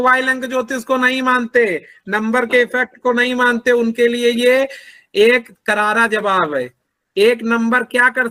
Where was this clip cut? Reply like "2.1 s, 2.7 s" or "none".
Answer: none